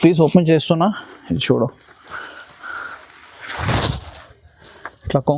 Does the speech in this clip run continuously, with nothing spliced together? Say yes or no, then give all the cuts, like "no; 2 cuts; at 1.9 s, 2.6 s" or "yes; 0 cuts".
yes; 0 cuts